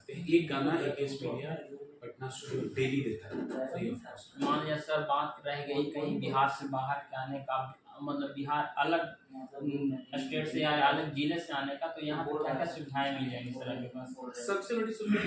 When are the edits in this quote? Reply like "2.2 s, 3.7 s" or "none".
none